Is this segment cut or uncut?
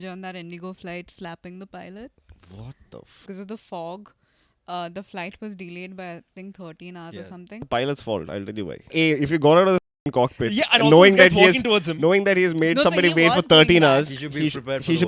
cut